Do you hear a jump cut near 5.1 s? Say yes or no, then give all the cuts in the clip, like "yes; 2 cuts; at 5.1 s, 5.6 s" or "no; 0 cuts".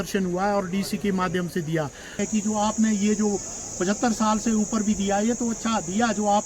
no; 1 cut; at 2.2 s